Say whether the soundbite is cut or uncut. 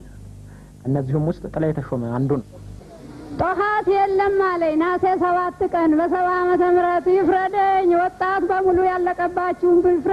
cut